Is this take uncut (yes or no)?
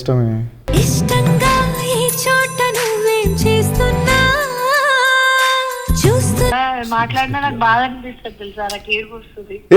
no